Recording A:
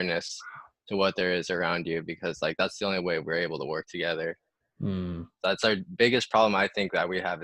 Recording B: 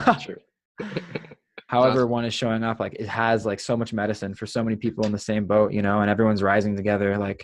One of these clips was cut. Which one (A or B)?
B